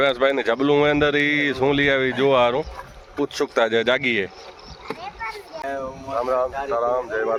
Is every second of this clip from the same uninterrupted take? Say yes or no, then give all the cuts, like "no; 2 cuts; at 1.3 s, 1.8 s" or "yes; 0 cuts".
yes; 0 cuts